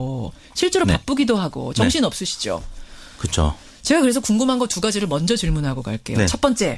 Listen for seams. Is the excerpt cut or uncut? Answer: uncut